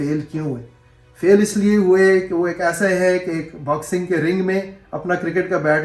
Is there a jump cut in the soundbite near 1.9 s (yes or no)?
no